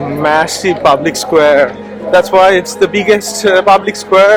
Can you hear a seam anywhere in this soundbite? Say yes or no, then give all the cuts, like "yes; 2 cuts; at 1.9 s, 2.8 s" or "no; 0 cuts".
no; 0 cuts